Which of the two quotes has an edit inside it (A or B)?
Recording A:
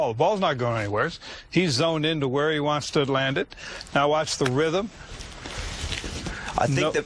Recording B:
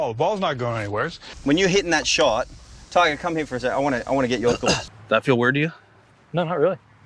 B